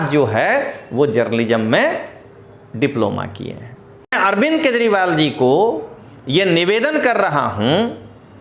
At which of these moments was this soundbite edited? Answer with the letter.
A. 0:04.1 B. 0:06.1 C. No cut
A